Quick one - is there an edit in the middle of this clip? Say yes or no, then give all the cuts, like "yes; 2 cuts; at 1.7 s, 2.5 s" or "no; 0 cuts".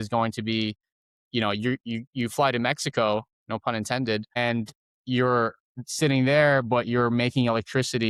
no; 0 cuts